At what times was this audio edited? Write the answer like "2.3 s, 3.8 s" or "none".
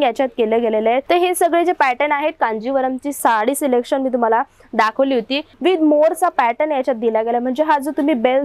1.0 s, 3.2 s, 5.5 s